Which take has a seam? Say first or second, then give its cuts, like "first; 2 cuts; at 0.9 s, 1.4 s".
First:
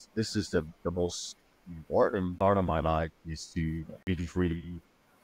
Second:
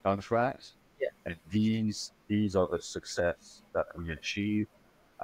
first; 2 cuts; at 2.3 s, 3.9 s